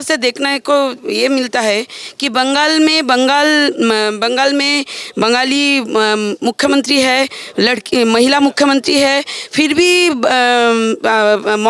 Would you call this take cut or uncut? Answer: uncut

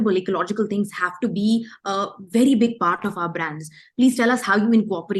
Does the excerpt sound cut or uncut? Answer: uncut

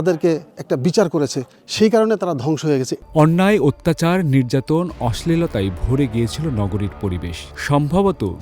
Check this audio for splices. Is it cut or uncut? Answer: cut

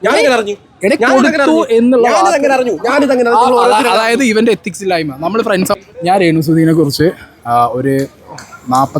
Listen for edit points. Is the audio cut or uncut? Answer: cut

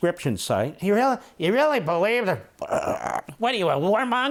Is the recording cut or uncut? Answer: uncut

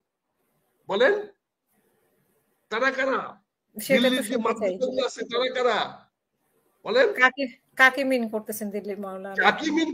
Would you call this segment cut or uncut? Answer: uncut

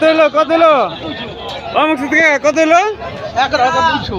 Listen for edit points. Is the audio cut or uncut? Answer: uncut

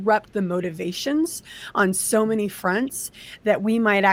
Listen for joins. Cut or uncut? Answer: uncut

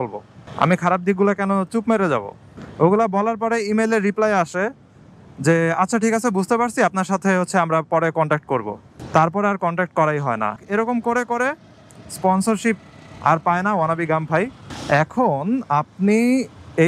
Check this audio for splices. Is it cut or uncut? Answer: cut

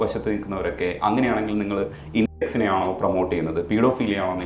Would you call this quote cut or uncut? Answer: uncut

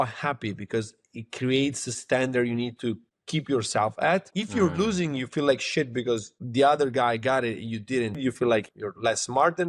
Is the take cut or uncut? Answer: cut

